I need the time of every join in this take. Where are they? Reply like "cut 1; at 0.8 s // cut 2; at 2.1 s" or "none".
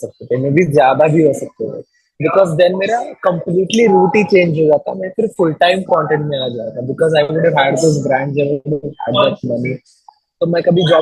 none